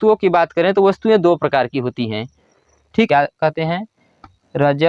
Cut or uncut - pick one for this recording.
cut